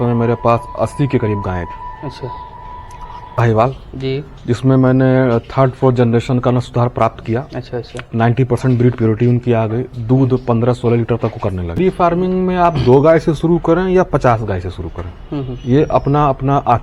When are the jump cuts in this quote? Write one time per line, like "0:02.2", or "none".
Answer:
0:03.3
0:11.8